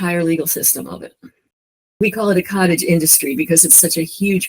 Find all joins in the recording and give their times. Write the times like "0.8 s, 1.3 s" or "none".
2.0 s